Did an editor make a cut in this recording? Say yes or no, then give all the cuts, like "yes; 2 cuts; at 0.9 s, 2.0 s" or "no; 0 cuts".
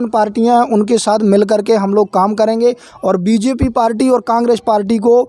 no; 0 cuts